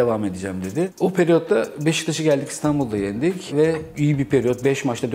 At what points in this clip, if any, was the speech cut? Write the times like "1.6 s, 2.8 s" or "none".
none

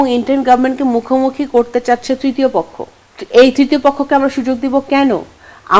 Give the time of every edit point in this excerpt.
none

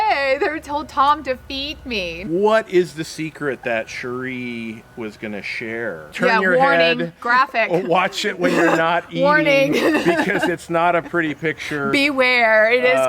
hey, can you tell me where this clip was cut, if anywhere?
2.2 s, 6.1 s

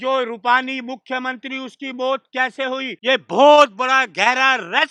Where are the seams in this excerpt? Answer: 2.9 s

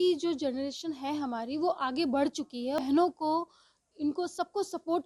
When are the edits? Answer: 2.8 s

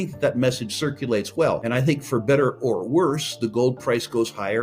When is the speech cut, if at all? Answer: 1.6 s

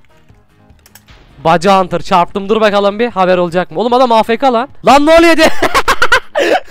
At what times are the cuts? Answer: 4.7 s

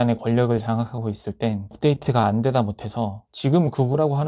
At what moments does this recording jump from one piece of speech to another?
3.2 s

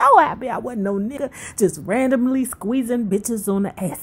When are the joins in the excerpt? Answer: 1.1 s

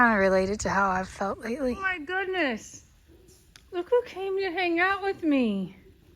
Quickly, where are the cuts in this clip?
1.9 s

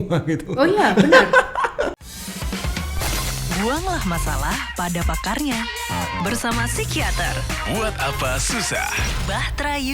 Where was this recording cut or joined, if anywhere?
2.0 s

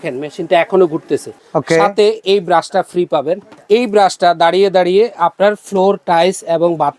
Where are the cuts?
1.3 s, 3.5 s

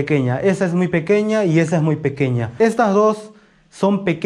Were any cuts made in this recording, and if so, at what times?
2.5 s

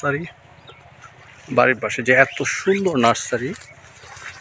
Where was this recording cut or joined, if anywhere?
none

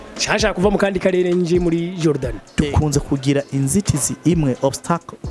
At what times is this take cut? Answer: 2.4 s

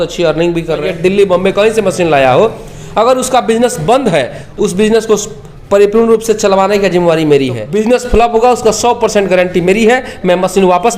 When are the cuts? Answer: 0.9 s, 4.4 s, 7.6 s

